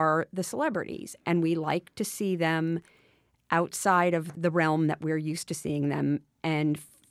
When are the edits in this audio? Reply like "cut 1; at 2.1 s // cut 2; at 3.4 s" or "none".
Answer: cut 1; at 4.3 s